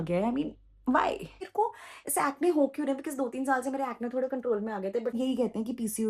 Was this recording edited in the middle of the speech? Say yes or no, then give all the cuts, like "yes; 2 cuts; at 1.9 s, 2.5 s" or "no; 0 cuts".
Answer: yes; 2 cuts; at 1.4 s, 5.1 s